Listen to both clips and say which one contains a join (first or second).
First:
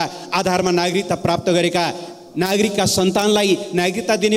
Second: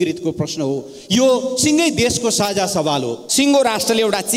second